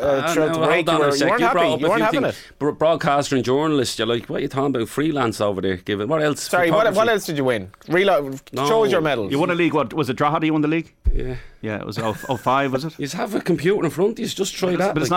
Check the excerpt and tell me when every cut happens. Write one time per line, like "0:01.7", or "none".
none

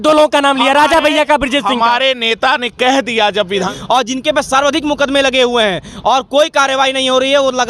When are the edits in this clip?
0:03.7

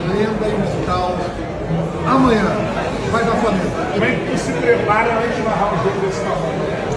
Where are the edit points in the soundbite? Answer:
none

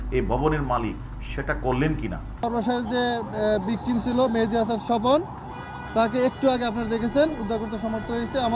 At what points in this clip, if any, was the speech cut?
0:02.4

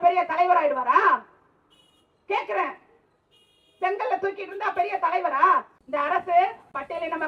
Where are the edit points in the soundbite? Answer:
0:05.8

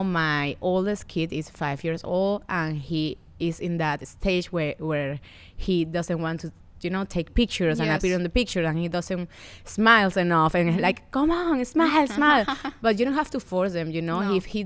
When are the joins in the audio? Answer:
none

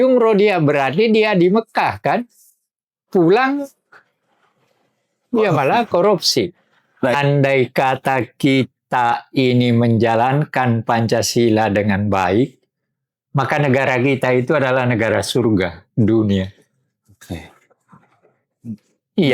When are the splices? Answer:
0:07.1

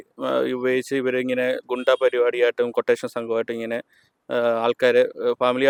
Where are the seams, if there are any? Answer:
none

